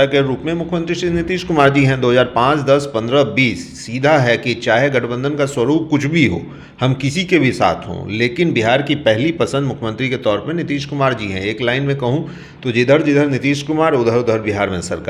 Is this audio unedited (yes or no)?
yes